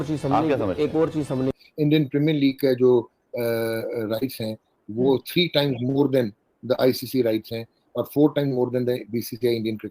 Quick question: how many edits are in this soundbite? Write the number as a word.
one